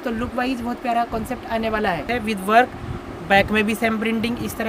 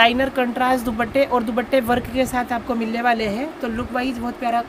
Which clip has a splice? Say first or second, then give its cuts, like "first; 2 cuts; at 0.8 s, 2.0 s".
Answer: first; 1 cut; at 2.0 s